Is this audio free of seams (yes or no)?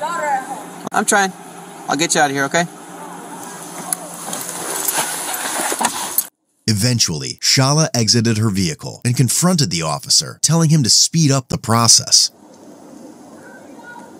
yes